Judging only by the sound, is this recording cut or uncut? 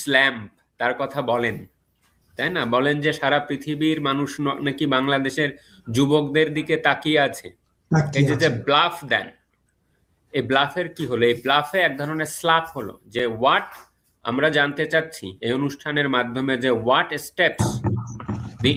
uncut